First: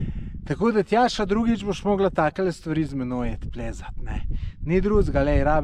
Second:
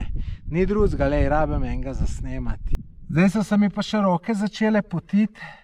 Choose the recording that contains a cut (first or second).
second